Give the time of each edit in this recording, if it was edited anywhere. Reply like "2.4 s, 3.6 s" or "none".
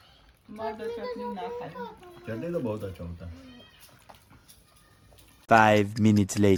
none